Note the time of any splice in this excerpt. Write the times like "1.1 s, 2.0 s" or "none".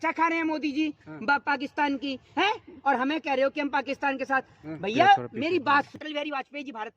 5.9 s

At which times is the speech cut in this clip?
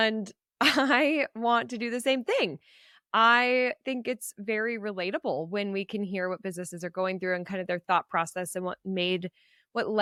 none

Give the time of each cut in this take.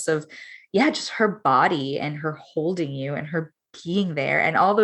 none

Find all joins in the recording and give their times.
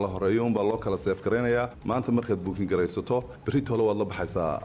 3.4 s

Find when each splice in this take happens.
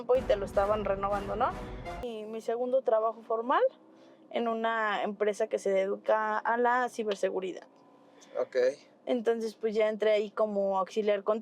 2.1 s

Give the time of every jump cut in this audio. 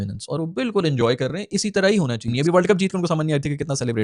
2.3 s

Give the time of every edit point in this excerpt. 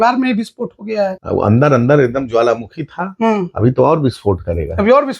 1.2 s

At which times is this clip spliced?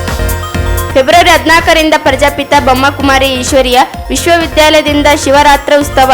0.9 s

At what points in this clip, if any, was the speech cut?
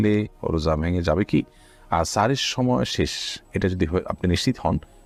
none

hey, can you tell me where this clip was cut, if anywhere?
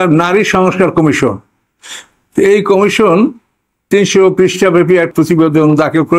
3.8 s, 5.1 s

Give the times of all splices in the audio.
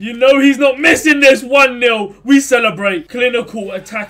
3.1 s

